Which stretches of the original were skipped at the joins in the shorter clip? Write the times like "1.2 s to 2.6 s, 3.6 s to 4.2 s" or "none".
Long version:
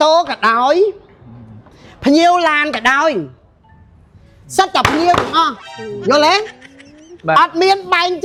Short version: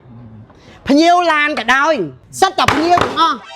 3.4 s to 4.4 s